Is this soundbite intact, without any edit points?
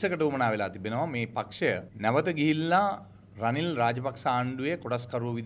yes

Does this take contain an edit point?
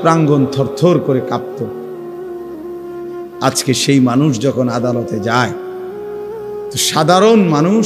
no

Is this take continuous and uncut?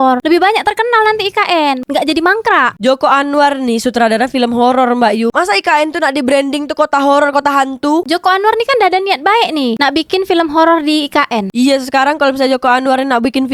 yes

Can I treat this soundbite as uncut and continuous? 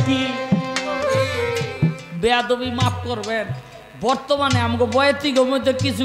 no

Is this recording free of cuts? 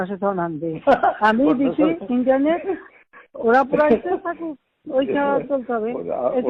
yes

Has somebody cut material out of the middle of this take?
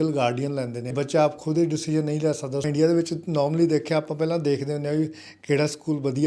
yes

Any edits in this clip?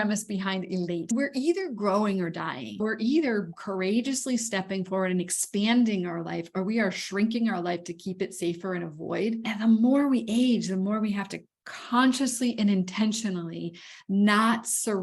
yes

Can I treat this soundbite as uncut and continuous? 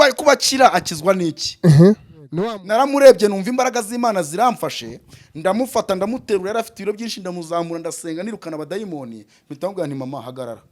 no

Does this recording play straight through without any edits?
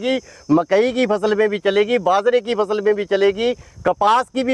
yes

